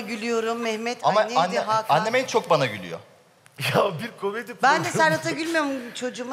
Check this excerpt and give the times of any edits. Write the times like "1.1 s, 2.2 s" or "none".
3.1 s